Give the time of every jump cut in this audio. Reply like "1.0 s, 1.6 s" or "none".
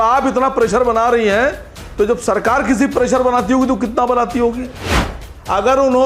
5.0 s